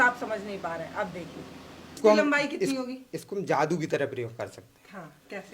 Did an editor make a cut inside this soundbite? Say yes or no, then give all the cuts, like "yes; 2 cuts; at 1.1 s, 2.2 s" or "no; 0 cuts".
yes; 1 cut; at 2.0 s